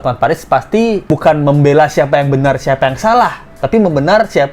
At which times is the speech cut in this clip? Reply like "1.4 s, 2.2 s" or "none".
none